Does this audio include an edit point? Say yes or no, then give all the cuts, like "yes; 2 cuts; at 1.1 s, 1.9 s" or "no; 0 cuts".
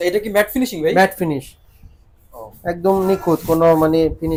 no; 0 cuts